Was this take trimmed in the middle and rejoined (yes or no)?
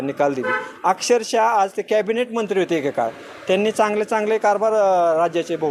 no